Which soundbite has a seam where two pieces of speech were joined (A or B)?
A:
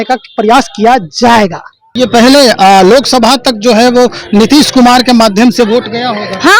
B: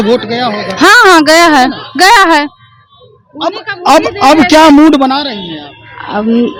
A